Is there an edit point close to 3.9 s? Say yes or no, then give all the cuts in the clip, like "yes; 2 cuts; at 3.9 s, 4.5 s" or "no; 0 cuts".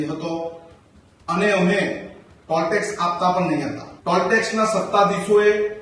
yes; 1 cut; at 3.9 s